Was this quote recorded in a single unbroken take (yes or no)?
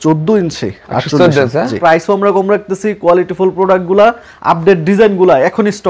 no